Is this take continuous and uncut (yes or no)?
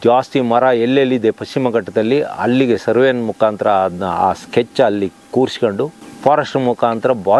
yes